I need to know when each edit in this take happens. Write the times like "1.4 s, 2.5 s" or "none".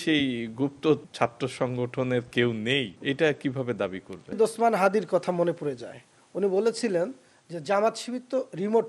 1.1 s, 2.9 s, 4.4 s